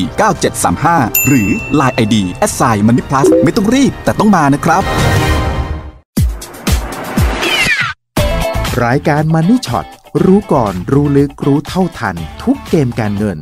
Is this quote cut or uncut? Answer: cut